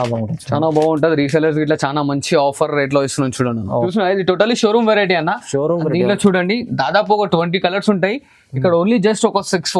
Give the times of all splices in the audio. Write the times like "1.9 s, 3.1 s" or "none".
3.9 s